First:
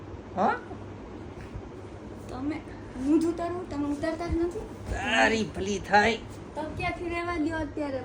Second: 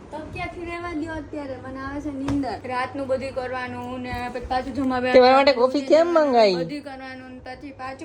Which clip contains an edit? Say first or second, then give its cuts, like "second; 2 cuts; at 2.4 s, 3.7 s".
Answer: second; 1 cut; at 2.6 s